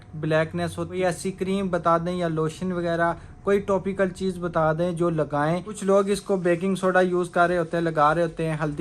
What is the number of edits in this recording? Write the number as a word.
two